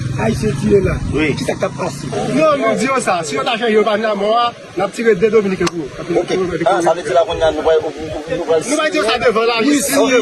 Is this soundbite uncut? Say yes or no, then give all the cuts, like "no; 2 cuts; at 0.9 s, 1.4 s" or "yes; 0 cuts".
no; 1 cut; at 2.1 s